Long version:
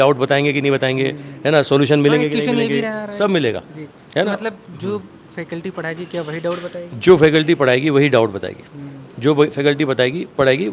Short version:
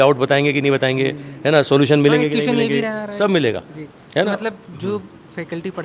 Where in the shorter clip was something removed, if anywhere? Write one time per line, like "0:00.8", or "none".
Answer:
none